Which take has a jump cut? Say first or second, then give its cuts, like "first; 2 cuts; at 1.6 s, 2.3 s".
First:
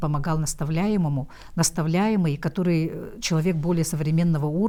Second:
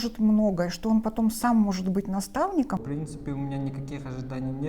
second; 1 cut; at 2.8 s